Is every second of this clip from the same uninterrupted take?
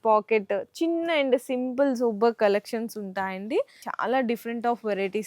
no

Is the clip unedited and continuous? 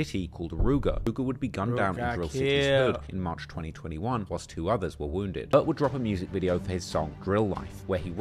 no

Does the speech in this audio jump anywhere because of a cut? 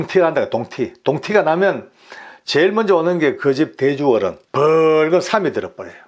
yes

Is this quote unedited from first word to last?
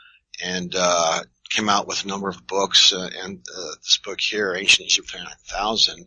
no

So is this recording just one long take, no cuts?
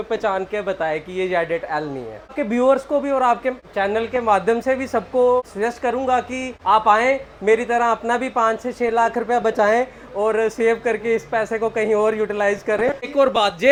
yes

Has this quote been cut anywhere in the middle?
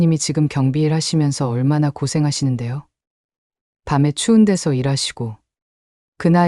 no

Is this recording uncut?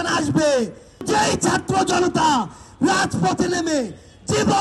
no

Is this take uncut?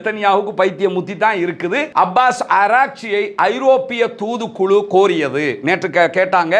no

